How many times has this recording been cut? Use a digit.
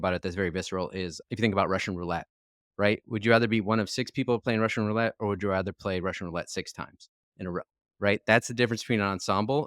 1